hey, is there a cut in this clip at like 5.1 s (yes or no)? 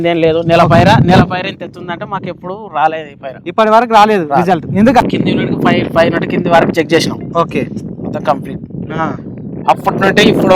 yes